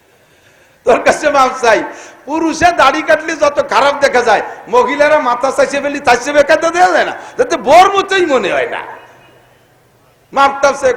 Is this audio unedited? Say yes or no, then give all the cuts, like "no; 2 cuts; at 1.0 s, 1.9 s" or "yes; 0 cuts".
yes; 0 cuts